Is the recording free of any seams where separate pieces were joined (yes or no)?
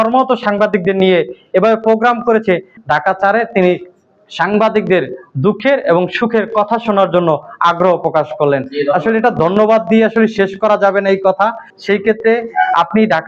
yes